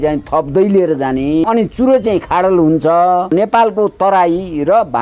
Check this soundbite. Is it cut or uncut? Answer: cut